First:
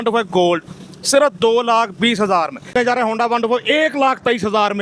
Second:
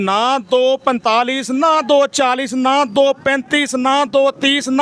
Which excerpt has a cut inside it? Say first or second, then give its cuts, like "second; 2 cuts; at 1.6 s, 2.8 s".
first; 1 cut; at 2.7 s